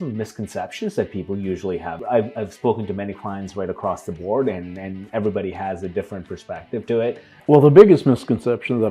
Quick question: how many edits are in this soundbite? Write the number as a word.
two